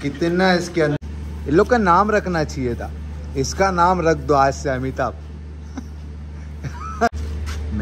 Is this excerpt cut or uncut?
cut